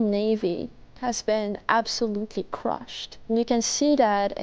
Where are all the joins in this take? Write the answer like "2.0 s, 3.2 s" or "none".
3.3 s